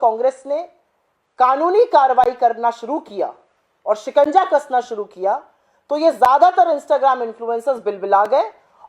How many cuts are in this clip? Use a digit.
0